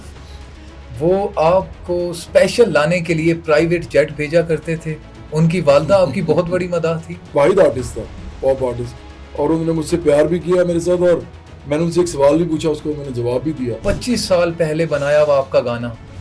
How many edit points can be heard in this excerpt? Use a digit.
2